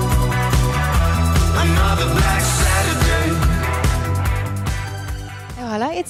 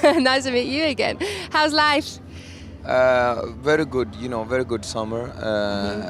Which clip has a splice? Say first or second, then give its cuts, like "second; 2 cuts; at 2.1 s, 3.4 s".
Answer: second; 1 cut; at 4.8 s